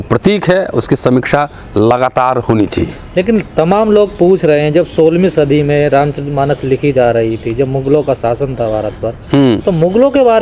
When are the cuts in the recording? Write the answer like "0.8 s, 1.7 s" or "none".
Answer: none